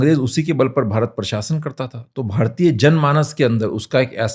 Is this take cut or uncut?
uncut